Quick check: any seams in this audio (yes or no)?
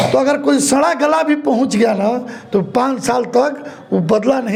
no